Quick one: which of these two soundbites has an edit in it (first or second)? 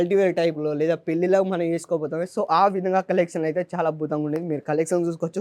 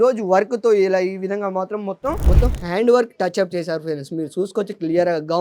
second